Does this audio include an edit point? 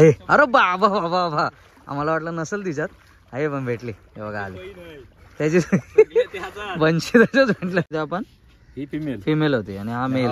yes; 1 cut; at 7.9 s

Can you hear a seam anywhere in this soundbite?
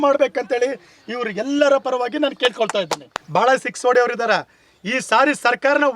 yes; 1 cut; at 3.1 s

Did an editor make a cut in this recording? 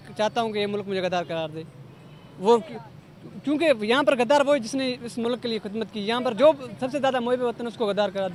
no; 0 cuts

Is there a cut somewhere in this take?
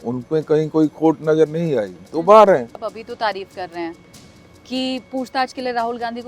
yes; 1 cut; at 3.0 s

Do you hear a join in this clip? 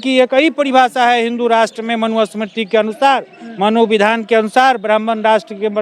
no; 0 cuts

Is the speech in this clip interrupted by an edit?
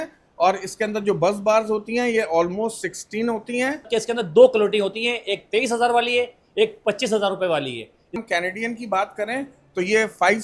yes; 2 cuts; at 3.9 s, 8.2 s

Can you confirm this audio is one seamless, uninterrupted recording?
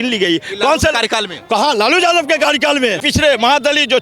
no; 1 cut; at 3.0 s

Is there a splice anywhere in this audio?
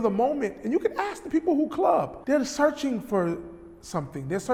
no; 0 cuts

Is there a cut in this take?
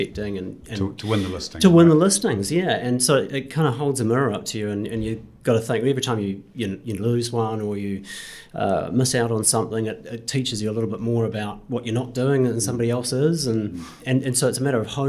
yes; 1 cut; at 14.0 s

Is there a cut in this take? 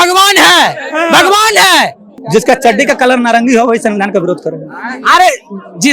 yes; 1 cut; at 2.2 s

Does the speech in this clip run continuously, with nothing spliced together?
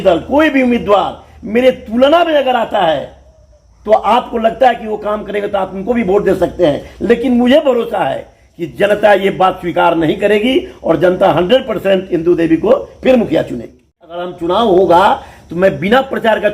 no; 1 cut; at 14.3 s

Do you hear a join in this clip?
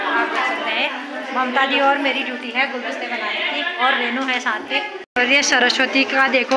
yes; 1 cut; at 5.3 s

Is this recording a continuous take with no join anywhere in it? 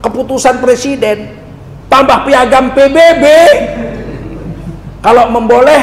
yes; 0 cuts

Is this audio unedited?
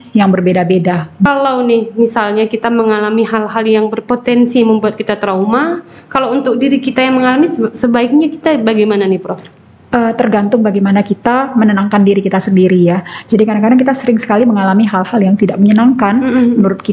no; 1 cut; at 1.3 s

